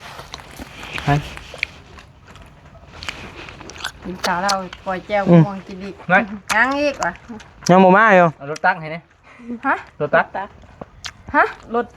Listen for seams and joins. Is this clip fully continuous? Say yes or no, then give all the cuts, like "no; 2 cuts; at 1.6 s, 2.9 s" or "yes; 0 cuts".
yes; 0 cuts